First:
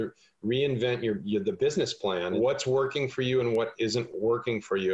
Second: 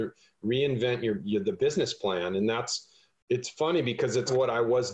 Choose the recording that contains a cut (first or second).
first